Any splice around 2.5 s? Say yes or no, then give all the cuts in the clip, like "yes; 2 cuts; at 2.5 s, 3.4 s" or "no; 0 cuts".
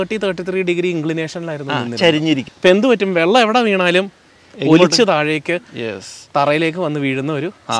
yes; 1 cut; at 2.5 s